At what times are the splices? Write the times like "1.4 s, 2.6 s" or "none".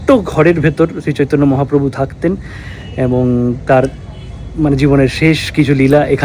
none